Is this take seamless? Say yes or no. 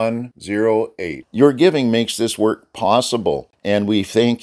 no